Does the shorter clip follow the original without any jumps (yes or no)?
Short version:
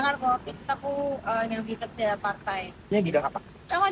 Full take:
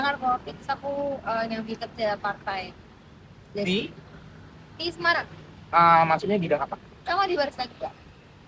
no